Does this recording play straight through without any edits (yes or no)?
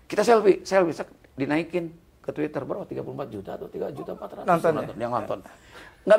yes